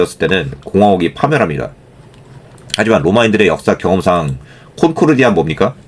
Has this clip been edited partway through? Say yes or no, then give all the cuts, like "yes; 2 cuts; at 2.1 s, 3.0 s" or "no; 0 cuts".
no; 0 cuts